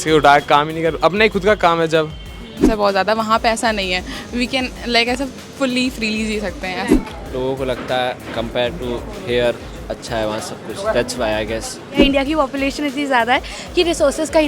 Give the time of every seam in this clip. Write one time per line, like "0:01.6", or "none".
0:02.6
0:06.9
0:12.0